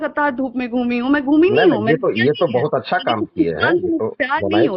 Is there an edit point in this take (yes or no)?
no